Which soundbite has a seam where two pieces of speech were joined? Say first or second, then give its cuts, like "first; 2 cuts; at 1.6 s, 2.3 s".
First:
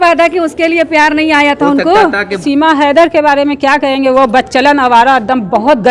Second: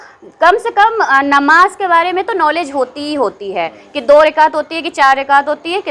first; 1 cut; at 2.4 s